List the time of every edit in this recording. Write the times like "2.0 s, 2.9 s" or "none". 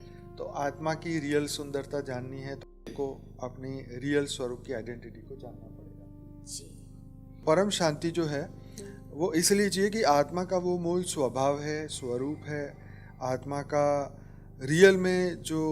7.5 s